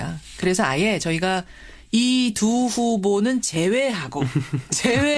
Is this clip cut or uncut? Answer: cut